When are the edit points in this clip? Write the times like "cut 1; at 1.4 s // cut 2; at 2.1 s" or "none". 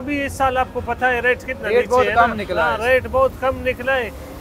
none

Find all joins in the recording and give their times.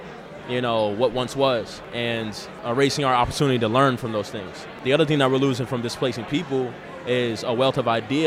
cut 1; at 2.0 s // cut 2; at 4.7 s

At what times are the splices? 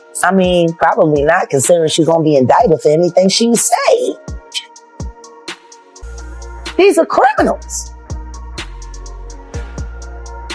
cut 1; at 7.7 s

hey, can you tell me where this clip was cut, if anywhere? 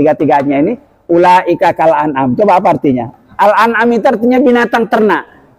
cut 1; at 3.1 s

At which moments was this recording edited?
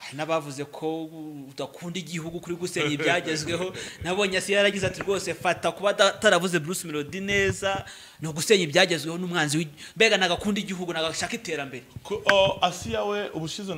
none

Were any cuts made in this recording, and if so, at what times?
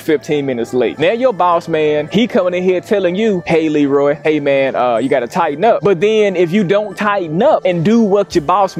none

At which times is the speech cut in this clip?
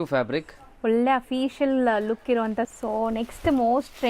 cut 1; at 2.7 s

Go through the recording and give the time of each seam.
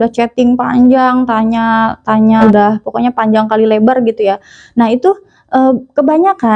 cut 1; at 2.5 s

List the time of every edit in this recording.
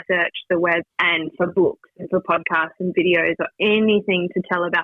none

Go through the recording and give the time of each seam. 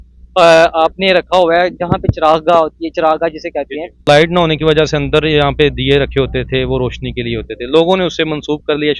cut 1; at 4.0 s

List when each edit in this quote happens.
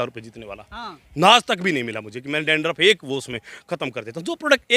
none

